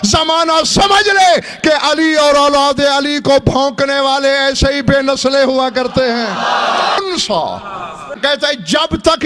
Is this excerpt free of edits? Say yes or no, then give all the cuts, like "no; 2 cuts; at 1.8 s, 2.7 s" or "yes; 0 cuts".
no; 1 cut; at 7.0 s